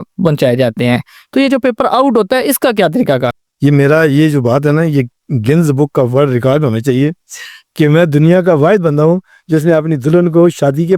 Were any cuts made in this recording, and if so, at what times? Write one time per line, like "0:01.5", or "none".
0:03.4